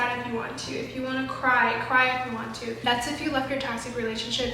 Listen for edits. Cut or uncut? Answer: cut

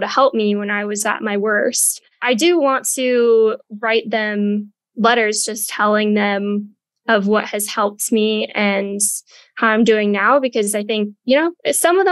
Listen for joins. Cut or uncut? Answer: uncut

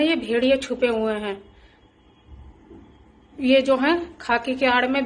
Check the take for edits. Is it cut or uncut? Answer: uncut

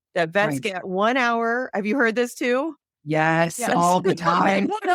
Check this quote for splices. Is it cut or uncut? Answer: uncut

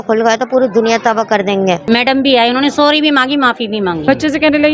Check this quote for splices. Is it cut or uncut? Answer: cut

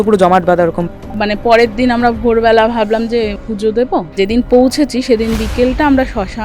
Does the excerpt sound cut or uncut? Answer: cut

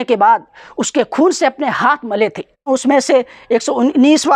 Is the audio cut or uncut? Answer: cut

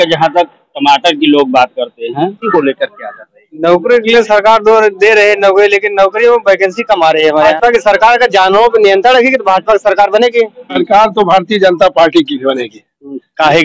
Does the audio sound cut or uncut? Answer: cut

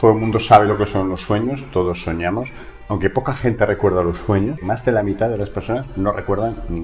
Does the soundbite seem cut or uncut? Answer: cut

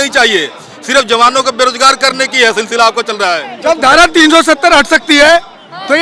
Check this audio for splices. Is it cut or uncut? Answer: cut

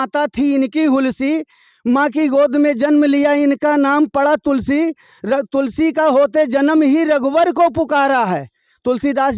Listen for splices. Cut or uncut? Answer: uncut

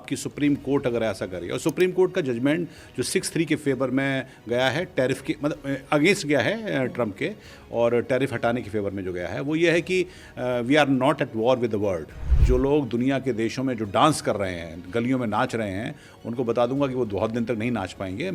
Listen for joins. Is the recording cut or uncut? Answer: cut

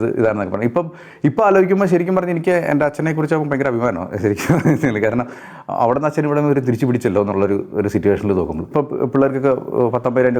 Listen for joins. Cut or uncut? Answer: cut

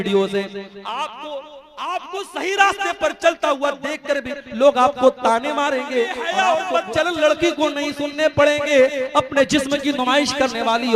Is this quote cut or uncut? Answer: cut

